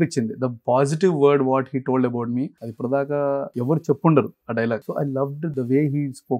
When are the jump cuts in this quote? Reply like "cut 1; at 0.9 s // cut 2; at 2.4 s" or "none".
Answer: cut 1; at 2.6 s // cut 2; at 3.5 s // cut 3; at 4.9 s